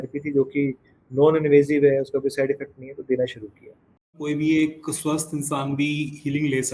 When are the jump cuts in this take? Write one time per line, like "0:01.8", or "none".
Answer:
0:04.2